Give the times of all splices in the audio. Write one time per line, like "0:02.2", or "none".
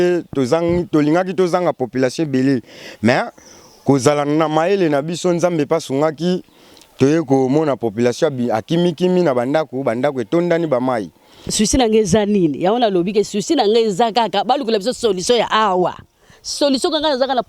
0:11.5